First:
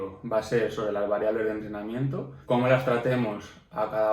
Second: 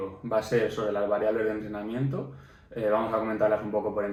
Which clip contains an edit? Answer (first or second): first